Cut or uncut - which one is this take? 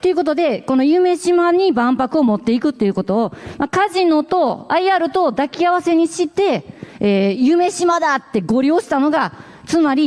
uncut